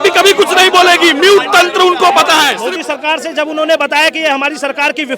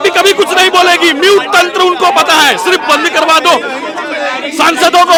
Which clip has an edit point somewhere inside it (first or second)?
first